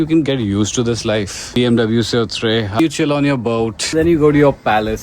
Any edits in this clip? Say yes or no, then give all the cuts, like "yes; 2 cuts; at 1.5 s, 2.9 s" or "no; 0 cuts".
yes; 3 cuts; at 1.6 s, 2.8 s, 3.9 s